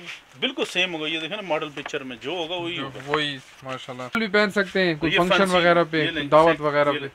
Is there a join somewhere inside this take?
yes; 1 cut; at 4.2 s

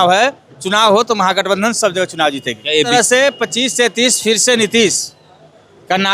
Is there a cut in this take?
yes; 1 cut; at 2.9 s

